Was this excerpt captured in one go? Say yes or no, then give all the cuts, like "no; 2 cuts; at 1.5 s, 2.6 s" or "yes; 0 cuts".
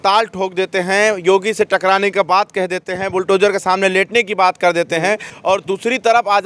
no; 1 cut; at 5.3 s